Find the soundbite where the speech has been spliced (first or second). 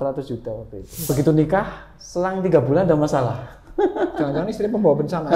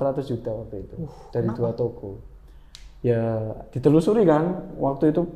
first